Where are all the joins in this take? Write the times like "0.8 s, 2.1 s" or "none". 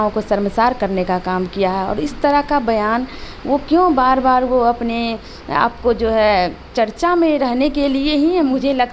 none